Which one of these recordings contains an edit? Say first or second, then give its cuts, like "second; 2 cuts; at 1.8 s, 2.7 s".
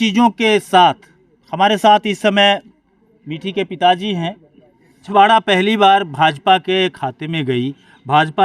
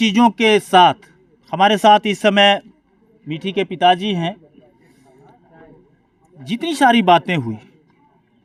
first; 1 cut; at 5.1 s